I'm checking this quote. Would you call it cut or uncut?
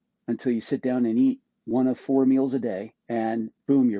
cut